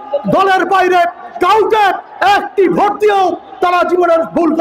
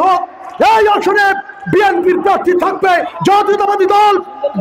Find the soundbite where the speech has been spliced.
second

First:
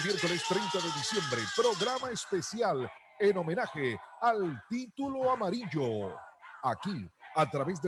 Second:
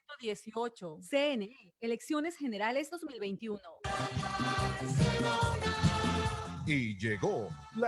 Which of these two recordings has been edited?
second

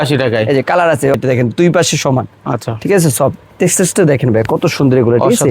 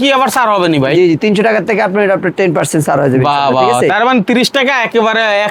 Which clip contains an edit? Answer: first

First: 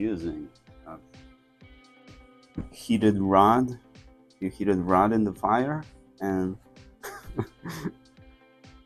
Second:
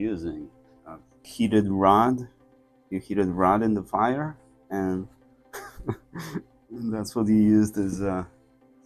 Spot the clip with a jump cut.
second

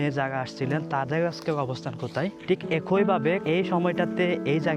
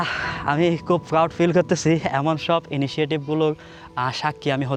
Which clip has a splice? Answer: first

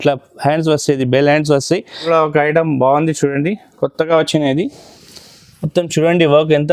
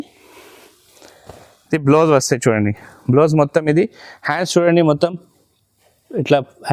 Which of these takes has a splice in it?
first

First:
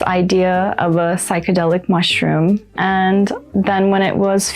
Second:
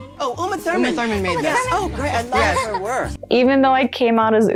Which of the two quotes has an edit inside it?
first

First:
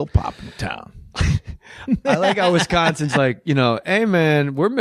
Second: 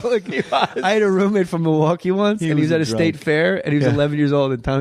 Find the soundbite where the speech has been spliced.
second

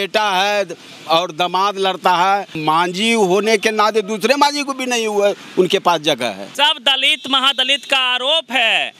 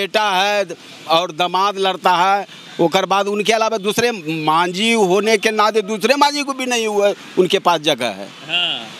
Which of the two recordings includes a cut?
first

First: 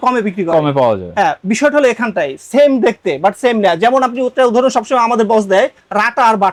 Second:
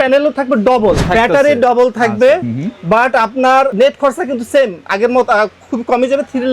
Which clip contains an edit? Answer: second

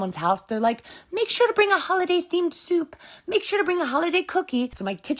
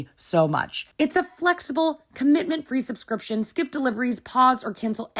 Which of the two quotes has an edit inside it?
second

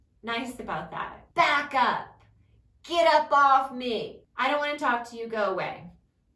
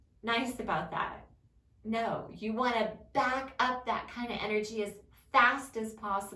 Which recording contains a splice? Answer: first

